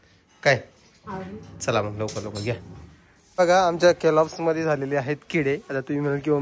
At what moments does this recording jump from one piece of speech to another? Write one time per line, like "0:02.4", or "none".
0:03.2